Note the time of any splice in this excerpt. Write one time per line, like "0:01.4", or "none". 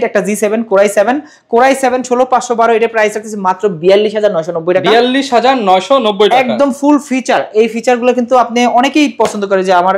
none